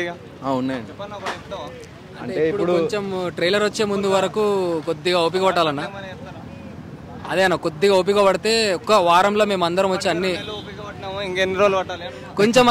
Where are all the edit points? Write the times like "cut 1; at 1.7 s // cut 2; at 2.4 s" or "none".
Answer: none